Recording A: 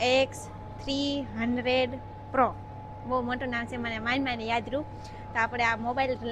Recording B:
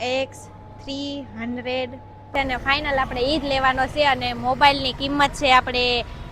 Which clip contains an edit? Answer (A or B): B